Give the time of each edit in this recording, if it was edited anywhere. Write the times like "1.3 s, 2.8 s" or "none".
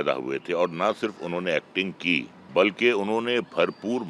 2.4 s